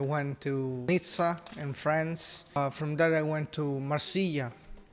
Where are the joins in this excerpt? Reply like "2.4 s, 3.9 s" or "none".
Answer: 0.9 s, 2.6 s